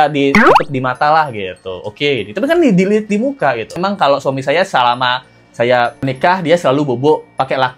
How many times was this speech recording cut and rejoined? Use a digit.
1